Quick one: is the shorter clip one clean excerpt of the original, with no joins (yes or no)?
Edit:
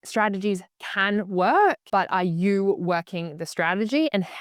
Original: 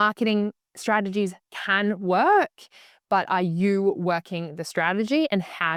no